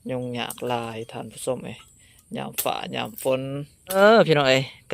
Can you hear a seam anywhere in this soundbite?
yes; 1 cut; at 4.0 s

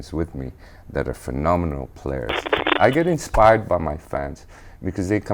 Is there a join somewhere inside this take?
yes; 1 cut; at 2.7 s

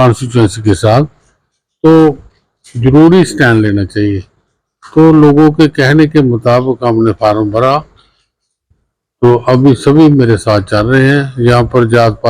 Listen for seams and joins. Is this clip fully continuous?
yes; 0 cuts

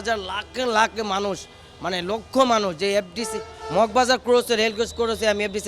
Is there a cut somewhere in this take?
no; 0 cuts

